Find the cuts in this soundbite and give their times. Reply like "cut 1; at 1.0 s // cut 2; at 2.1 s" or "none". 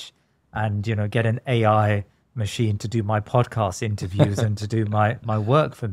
none